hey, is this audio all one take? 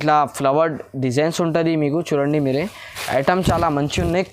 yes; 0 cuts

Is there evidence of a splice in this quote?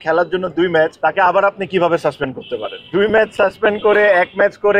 yes; 2 cuts; at 0.9 s, 2.8 s

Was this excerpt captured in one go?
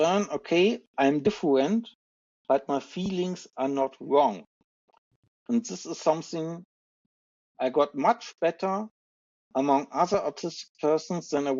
yes; 0 cuts

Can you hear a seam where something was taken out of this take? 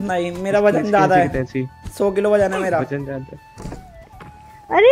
no; 0 cuts

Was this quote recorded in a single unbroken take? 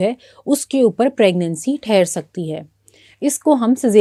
yes; 0 cuts

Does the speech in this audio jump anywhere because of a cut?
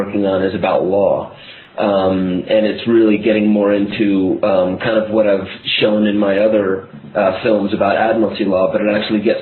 no; 0 cuts

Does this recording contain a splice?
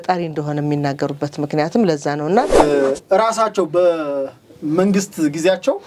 yes; 1 cut; at 2.6 s

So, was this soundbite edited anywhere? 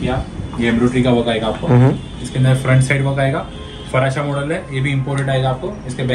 no; 0 cuts

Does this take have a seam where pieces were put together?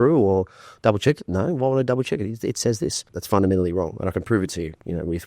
yes; 1 cut; at 3.1 s

